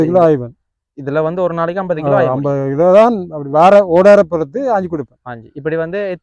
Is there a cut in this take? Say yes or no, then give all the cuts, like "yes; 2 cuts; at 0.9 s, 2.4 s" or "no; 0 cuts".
no; 0 cuts